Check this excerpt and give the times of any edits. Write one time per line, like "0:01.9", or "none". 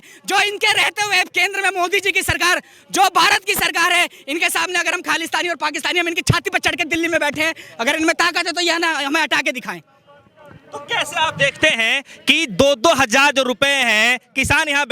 none